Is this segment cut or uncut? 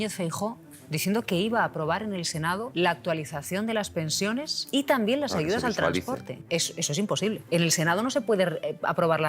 cut